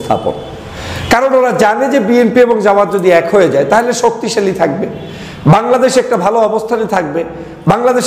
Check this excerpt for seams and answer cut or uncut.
uncut